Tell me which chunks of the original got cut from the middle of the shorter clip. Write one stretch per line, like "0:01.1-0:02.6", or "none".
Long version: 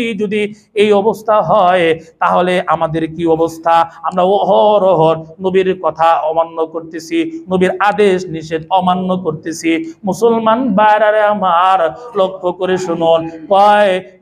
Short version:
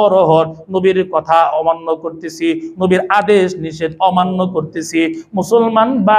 none

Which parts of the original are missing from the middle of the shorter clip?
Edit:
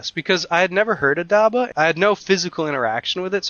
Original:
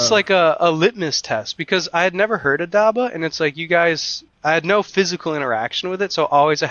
0:03.1-0:04.4

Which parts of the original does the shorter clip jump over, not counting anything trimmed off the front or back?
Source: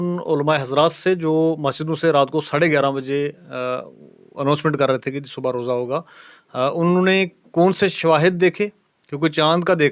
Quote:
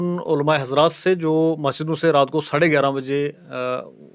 none

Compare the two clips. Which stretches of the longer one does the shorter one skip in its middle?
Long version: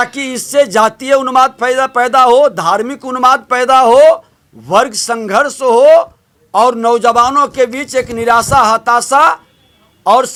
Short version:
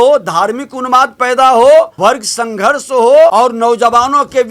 0:04.2-0:04.6
0:06.0-0:06.5

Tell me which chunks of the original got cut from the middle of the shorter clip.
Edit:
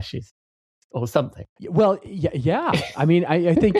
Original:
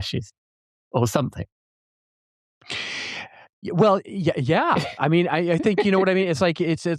0:01.5-0:03.5

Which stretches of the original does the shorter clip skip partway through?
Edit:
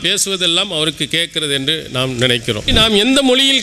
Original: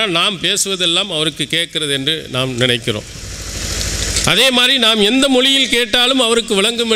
0:03.1-0:04.7

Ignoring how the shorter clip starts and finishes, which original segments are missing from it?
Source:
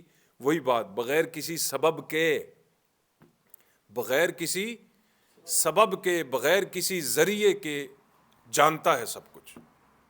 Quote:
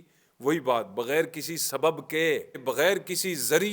0:02.6-0:06.3

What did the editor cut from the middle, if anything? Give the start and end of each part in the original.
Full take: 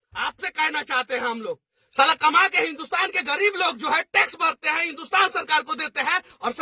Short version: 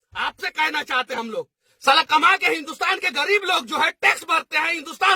0:01.1-0:01.2

